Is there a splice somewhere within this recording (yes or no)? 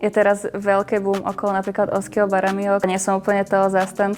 yes